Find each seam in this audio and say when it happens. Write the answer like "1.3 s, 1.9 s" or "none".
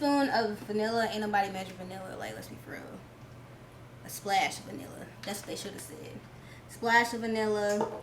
none